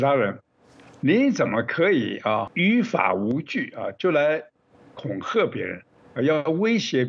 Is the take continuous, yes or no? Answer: no